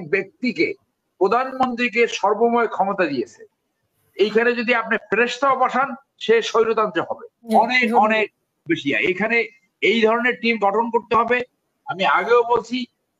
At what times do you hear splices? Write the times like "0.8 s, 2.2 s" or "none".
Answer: 7.5 s